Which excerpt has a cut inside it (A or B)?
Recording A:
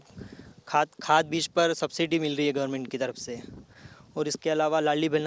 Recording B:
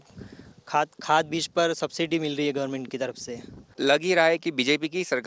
B